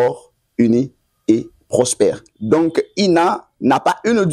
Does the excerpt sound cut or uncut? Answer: cut